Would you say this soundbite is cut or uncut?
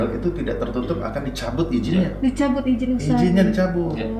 uncut